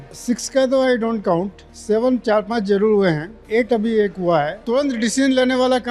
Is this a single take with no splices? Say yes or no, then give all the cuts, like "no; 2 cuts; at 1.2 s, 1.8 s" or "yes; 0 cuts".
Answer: no; 1 cut; at 4.6 s